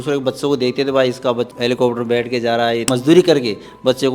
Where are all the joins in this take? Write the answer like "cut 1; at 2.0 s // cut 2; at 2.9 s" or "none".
cut 1; at 1.5 s // cut 2; at 2.9 s